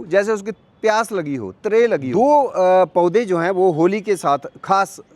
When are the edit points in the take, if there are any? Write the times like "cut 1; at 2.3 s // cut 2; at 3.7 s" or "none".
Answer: cut 1; at 2.1 s

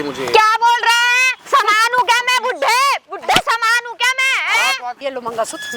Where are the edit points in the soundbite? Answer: cut 1; at 1.3 s // cut 2; at 5.0 s

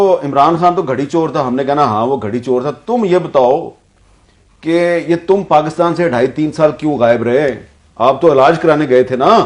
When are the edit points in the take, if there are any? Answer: none

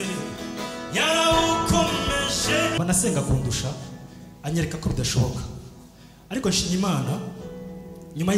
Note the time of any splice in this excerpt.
cut 1; at 2.8 s

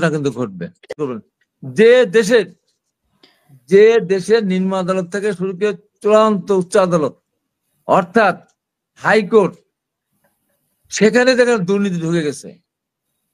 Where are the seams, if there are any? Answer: cut 1; at 1.0 s

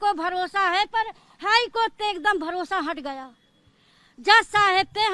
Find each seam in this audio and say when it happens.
none

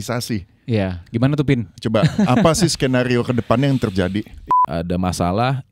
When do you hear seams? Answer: cut 1; at 4.4 s

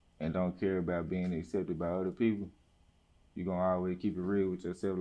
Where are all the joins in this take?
none

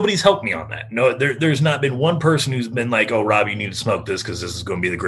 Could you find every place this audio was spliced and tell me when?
none

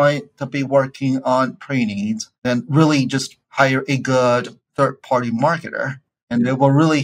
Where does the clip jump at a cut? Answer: cut 1; at 2.3 s // cut 2; at 3.4 s // cut 3; at 4.6 s // cut 4; at 6.3 s

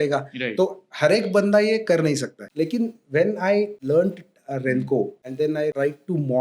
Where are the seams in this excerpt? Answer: cut 1; at 2.4 s // cut 2; at 3.8 s // cut 3; at 5.4 s

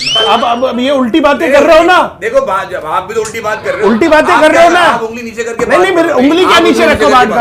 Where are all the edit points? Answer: none

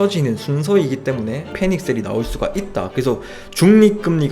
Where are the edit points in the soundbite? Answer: cut 1; at 1.5 s // cut 2; at 2.9 s

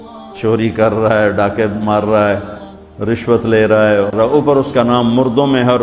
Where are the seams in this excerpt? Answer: cut 1; at 4.2 s

